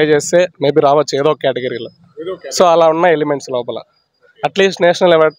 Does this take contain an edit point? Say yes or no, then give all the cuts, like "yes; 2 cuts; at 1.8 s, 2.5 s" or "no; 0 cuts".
no; 0 cuts